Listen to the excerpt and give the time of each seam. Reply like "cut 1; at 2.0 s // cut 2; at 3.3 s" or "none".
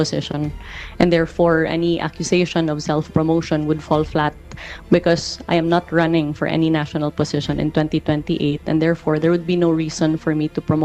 none